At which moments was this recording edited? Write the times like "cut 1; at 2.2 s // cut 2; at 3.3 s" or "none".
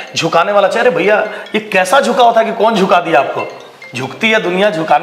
none